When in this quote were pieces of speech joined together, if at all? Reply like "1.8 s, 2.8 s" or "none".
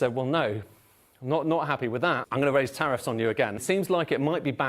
2.3 s, 3.6 s